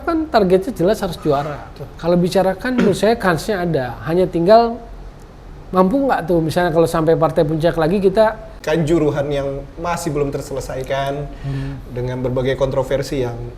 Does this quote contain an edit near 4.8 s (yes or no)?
no